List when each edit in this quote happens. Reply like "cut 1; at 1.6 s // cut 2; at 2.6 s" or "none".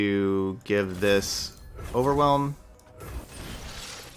cut 1; at 2.7 s